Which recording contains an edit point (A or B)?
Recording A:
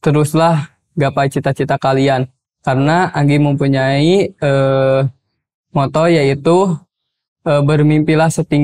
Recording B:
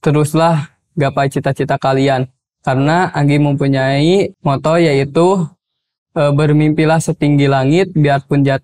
B